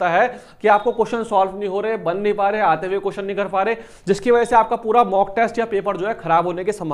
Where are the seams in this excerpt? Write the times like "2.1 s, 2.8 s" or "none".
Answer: none